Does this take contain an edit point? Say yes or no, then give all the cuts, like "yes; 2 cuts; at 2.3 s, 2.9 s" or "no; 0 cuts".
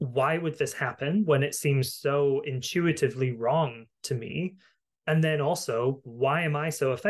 no; 0 cuts